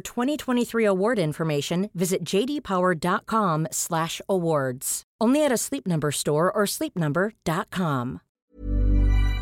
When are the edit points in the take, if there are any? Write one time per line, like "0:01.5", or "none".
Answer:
0:08.3